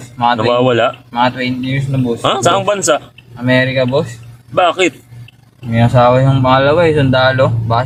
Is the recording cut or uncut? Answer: uncut